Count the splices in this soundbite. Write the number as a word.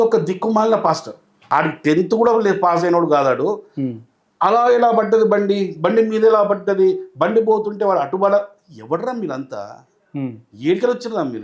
one